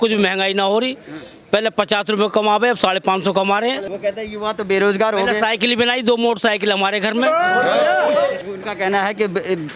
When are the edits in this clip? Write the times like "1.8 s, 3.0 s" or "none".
3.9 s, 8.4 s